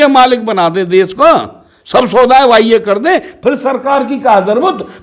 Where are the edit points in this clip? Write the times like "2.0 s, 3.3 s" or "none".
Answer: none